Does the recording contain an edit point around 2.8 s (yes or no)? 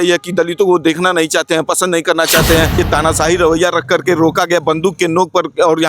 yes